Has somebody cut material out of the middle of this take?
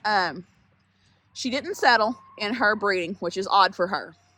no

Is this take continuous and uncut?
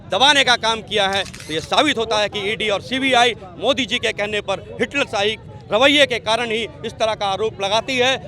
no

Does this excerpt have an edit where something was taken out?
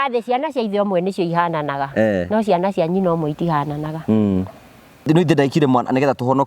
yes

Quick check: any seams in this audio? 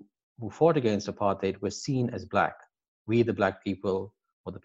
no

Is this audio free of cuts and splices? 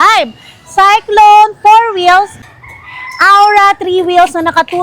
no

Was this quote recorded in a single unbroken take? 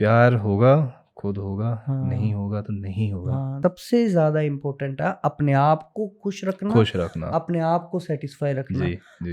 no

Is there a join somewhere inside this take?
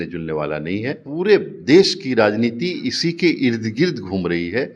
yes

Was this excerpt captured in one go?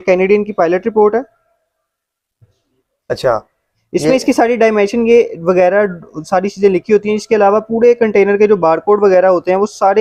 yes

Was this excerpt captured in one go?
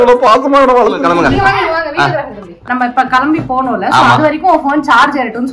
no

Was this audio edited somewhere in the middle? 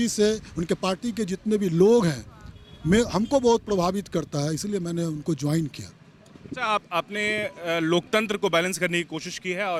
no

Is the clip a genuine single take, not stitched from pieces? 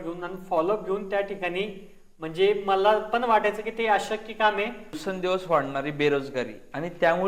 no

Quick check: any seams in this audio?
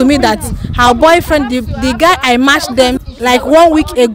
yes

